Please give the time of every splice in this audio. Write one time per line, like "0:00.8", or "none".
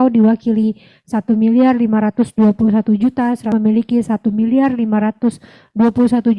0:03.5